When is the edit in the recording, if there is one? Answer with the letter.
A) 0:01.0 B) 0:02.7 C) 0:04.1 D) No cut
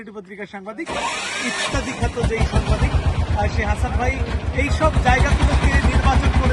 D